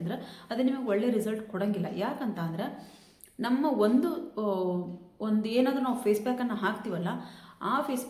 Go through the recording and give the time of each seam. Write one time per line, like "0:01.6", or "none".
none